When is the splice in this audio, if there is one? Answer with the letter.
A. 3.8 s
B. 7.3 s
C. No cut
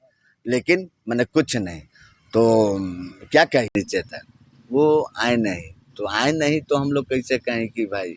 A